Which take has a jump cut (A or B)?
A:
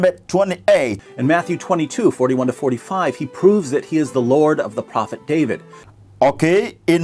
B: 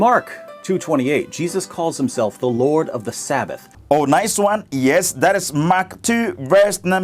A